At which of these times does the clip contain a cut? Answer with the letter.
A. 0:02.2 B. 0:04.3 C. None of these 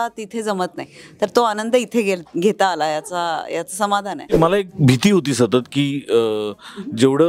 B